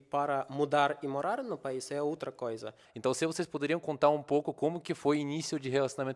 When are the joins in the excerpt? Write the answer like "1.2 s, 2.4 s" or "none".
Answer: 2.9 s

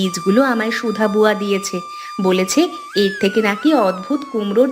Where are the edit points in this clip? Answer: none

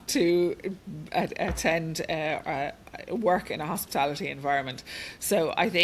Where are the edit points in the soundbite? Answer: none

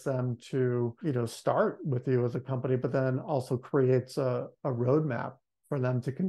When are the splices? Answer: 1.0 s

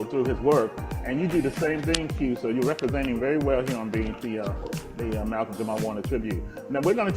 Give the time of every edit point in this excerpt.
5.8 s

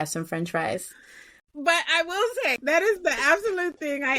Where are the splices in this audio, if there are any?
2.6 s

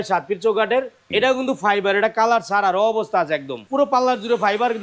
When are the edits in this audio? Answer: 1.0 s, 3.6 s

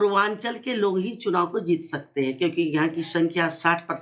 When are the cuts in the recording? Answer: none

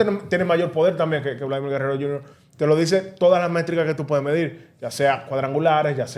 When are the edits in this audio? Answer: none

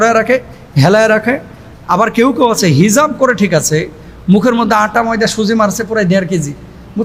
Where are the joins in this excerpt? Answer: none

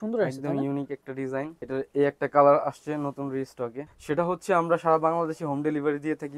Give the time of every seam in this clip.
1.6 s, 3.9 s

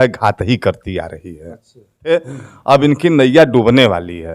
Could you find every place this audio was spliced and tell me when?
2.1 s

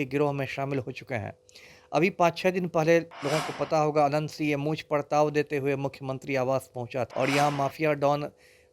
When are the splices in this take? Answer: 7.1 s

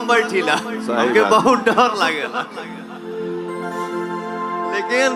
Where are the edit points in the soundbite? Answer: none

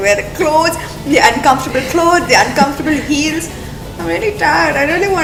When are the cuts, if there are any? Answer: none

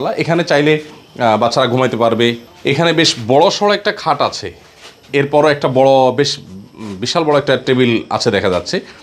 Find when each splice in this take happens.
2.4 s

